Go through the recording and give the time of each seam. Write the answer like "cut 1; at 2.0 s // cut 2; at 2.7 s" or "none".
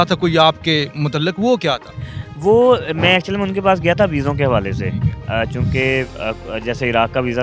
none